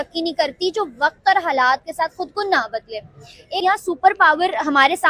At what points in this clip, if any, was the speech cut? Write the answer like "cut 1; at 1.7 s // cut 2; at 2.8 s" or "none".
cut 1; at 3.6 s

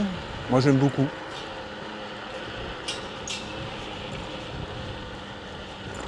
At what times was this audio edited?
none

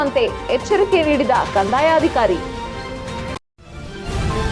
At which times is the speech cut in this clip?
cut 1; at 3.4 s

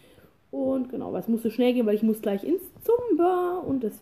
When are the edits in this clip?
none

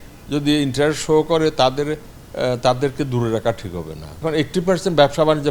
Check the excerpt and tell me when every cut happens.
cut 1; at 4.2 s

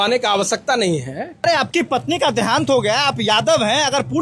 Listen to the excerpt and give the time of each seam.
cut 1; at 1.4 s

